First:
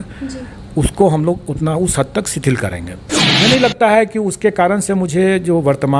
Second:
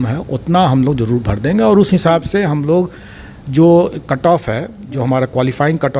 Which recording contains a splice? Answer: first; 1 cut; at 3.2 s

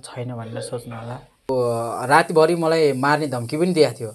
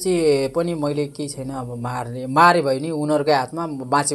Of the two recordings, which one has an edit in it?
first; 1 cut; at 1.5 s

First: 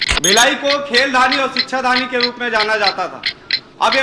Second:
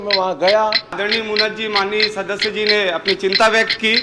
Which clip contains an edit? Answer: second; 1 cut; at 1.0 s

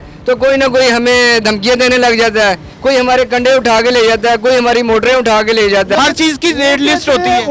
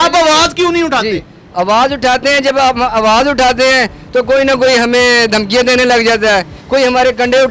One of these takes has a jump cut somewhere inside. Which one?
first; 1 cut; at 5.9 s

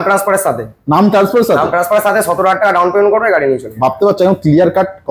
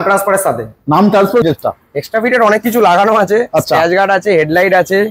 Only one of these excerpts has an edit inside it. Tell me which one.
second; 1 cut; at 1.4 s

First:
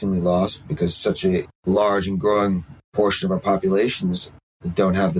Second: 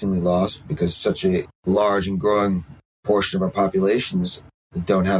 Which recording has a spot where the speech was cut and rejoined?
first; 1 cut; at 2.8 s

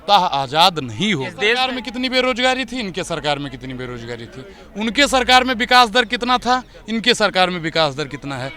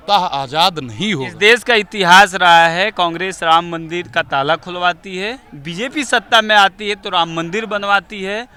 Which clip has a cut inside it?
first; 1 cut; at 1.4 s

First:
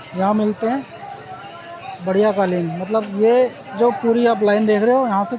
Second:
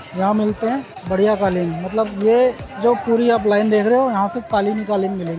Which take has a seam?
second; 1 cut; at 0.9 s

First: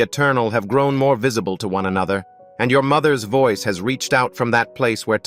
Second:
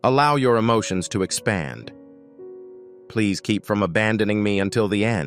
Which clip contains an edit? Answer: second; 2 cuts; at 1.9 s, 3.1 s

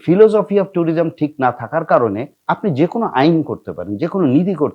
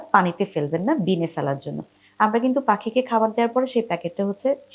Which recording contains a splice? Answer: first; 1 cut; at 2.3 s

